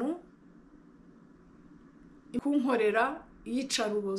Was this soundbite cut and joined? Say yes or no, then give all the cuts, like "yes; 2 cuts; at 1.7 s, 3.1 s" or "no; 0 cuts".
yes; 1 cut; at 2.4 s